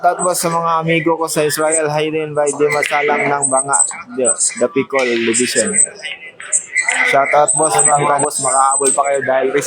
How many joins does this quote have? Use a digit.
1